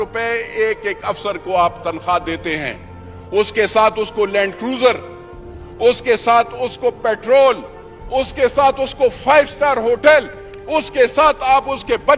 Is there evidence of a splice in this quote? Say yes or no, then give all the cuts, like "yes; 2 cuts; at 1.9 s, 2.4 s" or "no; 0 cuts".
no; 0 cuts